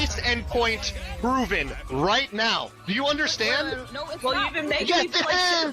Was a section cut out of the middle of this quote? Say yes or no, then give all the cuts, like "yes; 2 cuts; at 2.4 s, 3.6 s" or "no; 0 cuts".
yes; 1 cut; at 2.8 s